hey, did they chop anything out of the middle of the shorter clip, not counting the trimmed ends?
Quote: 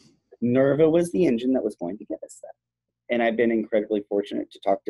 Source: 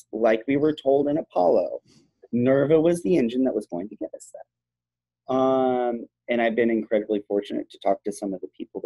yes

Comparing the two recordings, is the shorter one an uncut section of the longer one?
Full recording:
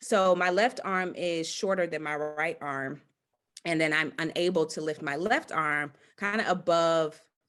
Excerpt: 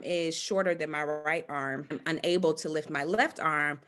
no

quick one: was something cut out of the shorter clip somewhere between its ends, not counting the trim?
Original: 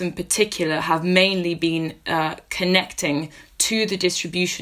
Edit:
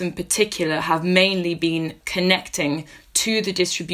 yes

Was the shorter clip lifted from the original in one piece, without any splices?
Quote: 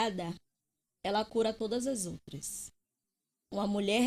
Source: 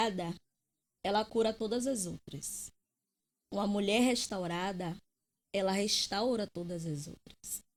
yes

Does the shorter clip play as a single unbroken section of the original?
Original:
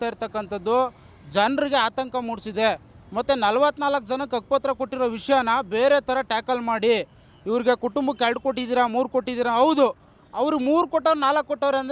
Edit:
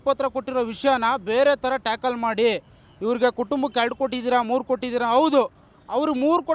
yes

